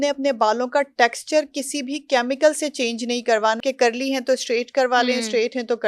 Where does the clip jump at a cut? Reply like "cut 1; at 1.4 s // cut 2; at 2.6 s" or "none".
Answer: cut 1; at 3.6 s